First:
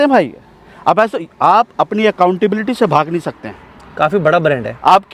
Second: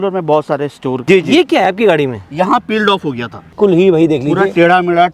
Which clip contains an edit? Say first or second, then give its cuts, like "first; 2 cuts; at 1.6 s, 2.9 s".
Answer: second; 2 cuts; at 1.1 s, 3.5 s